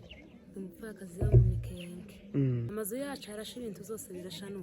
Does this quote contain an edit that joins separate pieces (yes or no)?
yes